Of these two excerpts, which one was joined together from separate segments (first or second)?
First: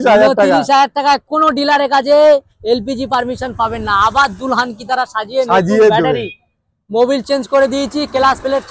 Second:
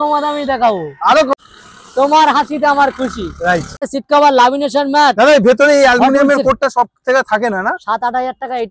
second